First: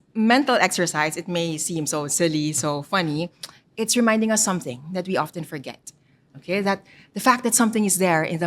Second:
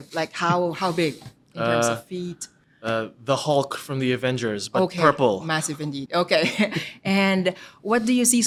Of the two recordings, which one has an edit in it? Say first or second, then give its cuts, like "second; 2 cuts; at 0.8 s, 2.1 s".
first; 1 cut; at 6.3 s